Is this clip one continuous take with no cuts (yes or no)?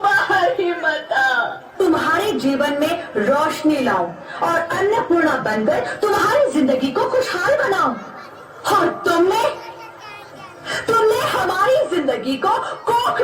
no